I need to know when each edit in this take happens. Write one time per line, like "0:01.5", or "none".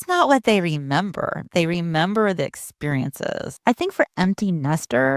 0:03.5